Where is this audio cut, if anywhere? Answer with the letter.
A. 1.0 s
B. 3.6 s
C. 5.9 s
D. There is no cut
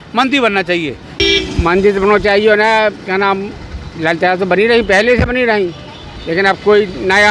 A